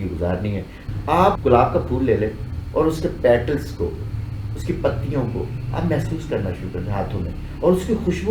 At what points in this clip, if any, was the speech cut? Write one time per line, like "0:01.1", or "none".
0:01.1